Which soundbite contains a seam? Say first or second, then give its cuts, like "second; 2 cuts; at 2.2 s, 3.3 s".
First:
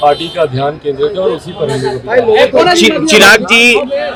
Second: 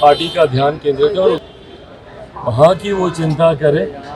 second; 1 cut; at 1.5 s